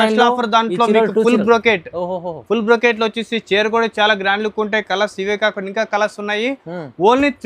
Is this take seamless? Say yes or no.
yes